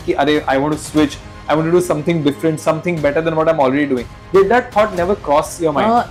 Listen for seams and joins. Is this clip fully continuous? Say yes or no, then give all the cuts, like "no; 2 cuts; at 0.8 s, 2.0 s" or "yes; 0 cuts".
yes; 0 cuts